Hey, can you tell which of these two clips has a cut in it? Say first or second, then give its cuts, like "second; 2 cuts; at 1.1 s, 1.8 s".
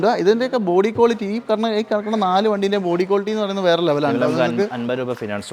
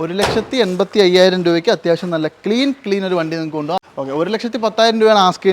second; 1 cut; at 3.8 s